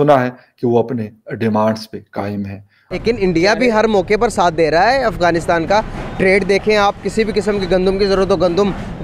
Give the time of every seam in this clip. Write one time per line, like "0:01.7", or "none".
0:03.0